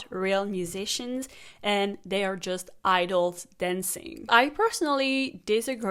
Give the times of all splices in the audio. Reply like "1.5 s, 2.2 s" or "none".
4.3 s